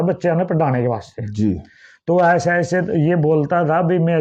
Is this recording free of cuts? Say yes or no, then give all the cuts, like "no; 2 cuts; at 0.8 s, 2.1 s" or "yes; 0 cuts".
yes; 0 cuts